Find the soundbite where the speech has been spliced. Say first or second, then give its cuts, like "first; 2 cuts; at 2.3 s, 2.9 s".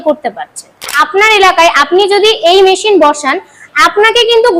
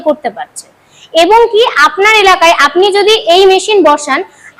first; 1 cut; at 1.0 s